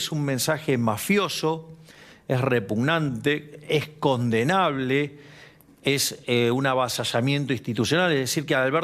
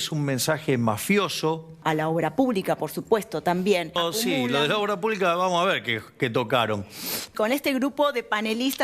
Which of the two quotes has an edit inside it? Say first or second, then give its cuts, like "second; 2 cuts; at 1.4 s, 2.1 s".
second; 3 cuts; at 1.8 s, 4.0 s, 7.3 s